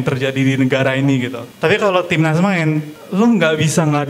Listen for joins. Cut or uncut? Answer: cut